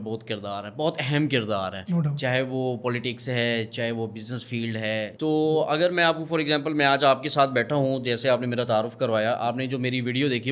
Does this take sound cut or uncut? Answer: uncut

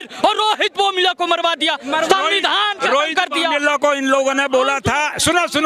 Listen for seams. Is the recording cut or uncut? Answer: uncut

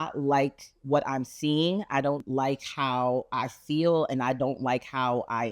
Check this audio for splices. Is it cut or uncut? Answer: uncut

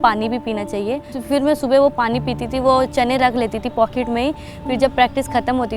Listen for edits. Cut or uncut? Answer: cut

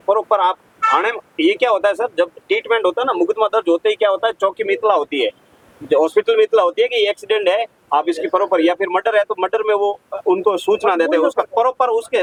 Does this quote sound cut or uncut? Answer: uncut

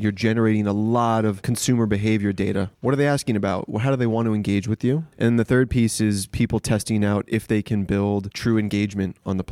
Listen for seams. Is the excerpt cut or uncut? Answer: cut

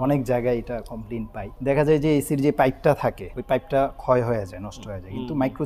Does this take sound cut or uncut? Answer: cut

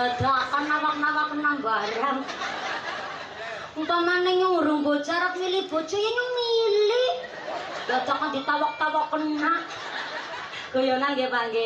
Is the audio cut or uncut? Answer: uncut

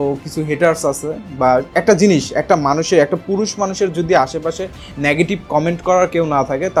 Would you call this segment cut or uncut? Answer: uncut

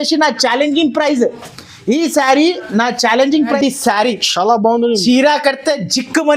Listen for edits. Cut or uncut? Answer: cut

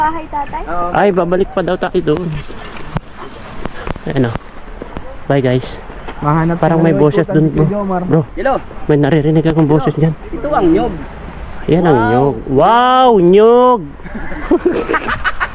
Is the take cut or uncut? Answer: uncut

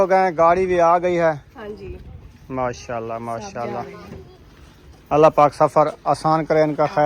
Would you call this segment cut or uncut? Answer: uncut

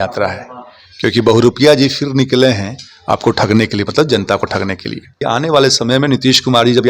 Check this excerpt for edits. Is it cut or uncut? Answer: cut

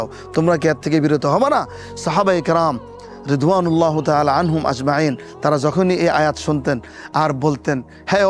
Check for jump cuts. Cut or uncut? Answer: uncut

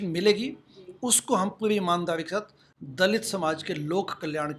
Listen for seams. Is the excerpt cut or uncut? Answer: uncut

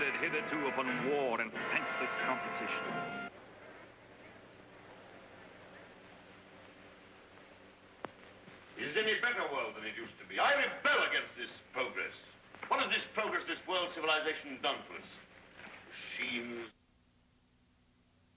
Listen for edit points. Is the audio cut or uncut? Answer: uncut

